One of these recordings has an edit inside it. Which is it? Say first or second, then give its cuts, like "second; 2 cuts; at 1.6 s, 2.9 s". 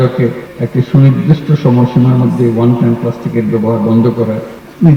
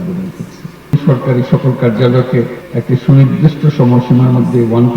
second; 1 cut; at 0.9 s